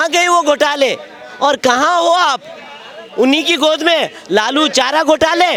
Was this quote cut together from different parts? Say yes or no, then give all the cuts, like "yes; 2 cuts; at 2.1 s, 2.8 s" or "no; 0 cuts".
no; 0 cuts